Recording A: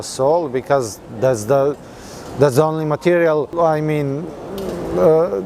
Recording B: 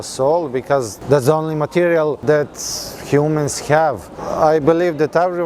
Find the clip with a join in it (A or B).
B